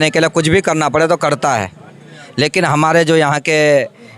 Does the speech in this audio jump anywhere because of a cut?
no; 0 cuts

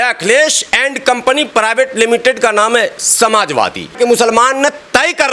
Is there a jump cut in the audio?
yes; 1 cut; at 3.9 s

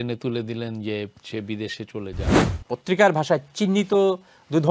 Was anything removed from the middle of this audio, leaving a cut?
yes; 1 cut; at 2.5 s

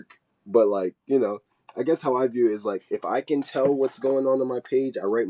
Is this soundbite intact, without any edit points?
yes; 0 cuts

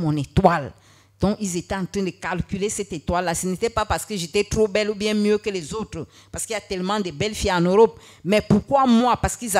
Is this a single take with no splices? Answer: yes; 0 cuts

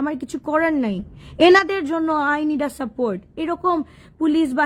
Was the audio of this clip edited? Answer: no; 0 cuts

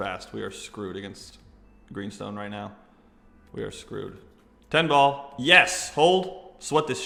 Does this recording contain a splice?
no; 0 cuts

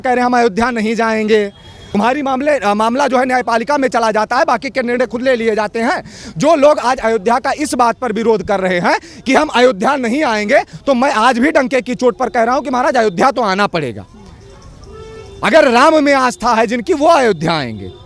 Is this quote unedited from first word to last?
yes; 0 cuts

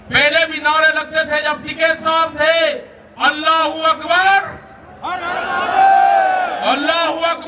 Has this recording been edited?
no; 0 cuts

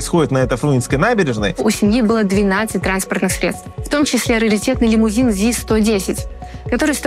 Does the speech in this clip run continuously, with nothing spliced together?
no; 2 cuts; at 1.6 s, 3.7 s

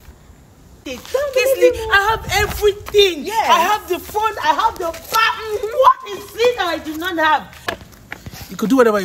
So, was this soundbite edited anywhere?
yes; 2 cuts; at 0.8 s, 7.7 s

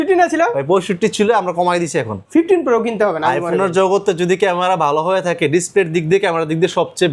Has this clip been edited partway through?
yes; 1 cut; at 2.1 s

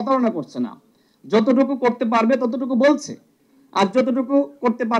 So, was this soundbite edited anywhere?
no; 0 cuts

